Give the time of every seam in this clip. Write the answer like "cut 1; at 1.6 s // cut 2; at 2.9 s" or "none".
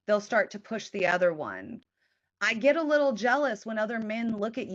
cut 1; at 1.8 s